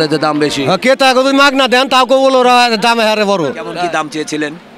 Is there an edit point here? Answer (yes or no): yes